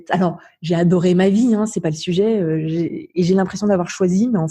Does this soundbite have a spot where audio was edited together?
no; 0 cuts

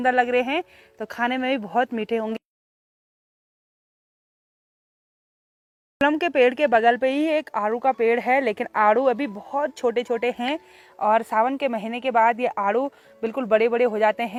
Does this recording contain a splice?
no; 0 cuts

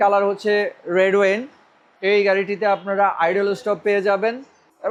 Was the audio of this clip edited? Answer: no; 0 cuts

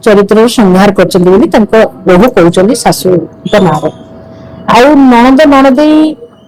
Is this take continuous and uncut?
yes; 0 cuts

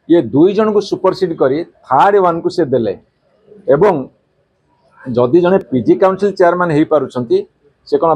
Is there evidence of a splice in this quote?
no; 0 cuts

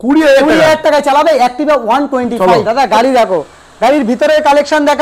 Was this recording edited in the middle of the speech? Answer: yes; 1 cut; at 2.3 s

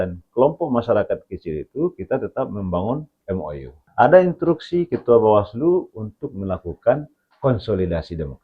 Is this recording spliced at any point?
yes; 1 cut; at 3.8 s

